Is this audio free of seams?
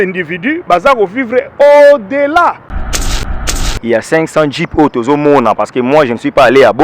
no; 1 cut; at 3.2 s

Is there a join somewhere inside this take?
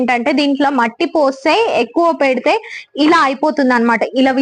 no; 0 cuts

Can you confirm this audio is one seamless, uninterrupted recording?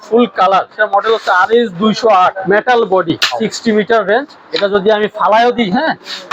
no; 3 cuts; at 0.8 s, 2.4 s, 3.4 s

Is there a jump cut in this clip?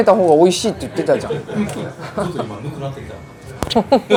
no; 0 cuts

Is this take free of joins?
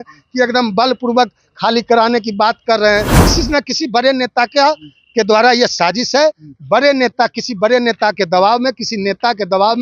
no; 1 cut; at 3.3 s

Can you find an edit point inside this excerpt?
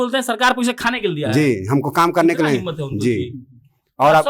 no; 0 cuts

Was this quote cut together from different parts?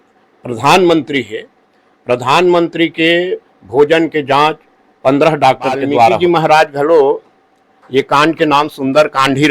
yes; 1 cut; at 6.2 s

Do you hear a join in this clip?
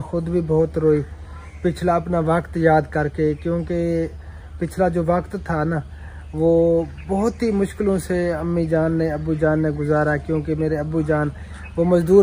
no; 0 cuts

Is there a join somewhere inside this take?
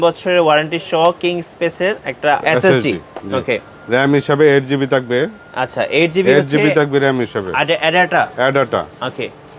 no; 0 cuts

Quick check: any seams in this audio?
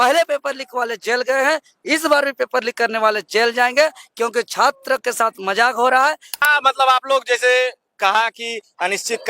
yes; 1 cut; at 6.4 s

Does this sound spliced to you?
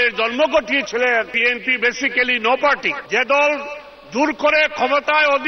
yes; 2 cuts; at 1.3 s, 2.9 s

